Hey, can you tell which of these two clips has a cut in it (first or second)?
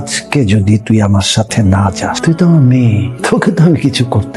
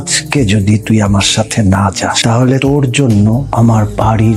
first